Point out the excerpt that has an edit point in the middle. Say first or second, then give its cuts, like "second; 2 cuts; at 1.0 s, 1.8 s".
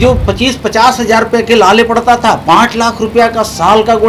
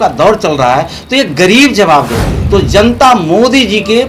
second; 1 cut; at 2.3 s